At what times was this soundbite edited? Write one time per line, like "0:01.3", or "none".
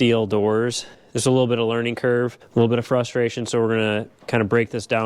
0:00.9
0:02.4